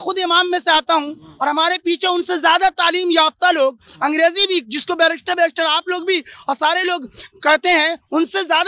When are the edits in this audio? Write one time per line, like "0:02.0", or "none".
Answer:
none